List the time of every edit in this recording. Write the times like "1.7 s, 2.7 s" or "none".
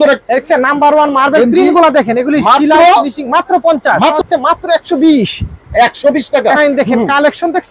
4.2 s, 6.6 s